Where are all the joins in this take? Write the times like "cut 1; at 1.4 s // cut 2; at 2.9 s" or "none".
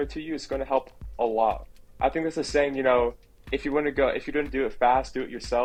none